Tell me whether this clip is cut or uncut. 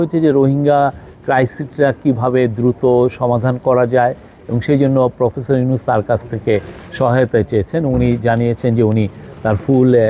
uncut